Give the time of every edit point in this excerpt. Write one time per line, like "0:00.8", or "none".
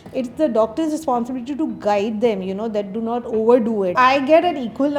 0:03.9